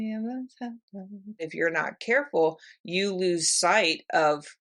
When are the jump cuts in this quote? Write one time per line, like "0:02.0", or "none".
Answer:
0:01.5